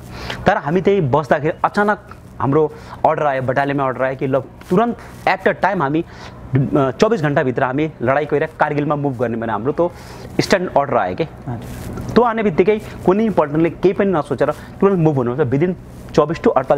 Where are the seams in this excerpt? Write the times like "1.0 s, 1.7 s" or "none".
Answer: none